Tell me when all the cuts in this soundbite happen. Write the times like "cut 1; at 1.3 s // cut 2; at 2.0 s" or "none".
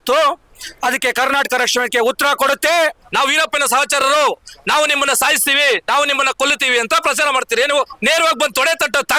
cut 1; at 3.0 s // cut 2; at 7.9 s